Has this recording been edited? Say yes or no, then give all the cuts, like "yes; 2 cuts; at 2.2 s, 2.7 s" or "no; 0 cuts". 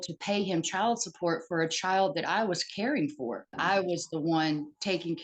yes; 1 cut; at 3.6 s